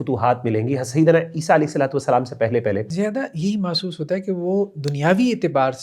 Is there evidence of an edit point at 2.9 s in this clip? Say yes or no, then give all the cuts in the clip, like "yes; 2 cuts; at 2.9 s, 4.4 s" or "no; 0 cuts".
yes; 1 cut; at 2.9 s